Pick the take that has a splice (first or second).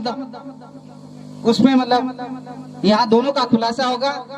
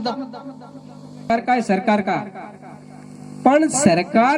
second